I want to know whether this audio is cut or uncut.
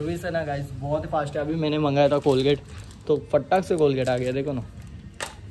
uncut